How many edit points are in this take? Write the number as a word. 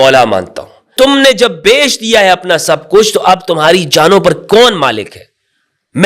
one